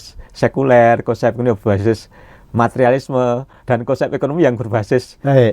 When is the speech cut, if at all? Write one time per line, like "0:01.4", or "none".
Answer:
none